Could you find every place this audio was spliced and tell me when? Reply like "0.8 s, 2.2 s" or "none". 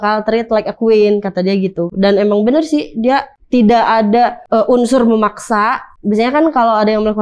3.4 s, 4.4 s, 5.9 s